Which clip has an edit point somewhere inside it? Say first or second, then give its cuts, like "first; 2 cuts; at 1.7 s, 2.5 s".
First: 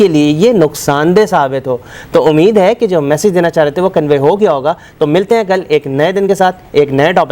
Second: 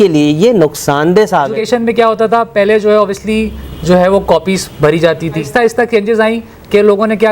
second; 2 cuts; at 1.6 s, 5.6 s